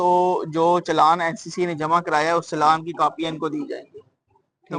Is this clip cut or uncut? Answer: uncut